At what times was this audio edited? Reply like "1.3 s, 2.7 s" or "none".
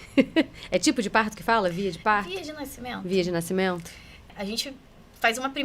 4.3 s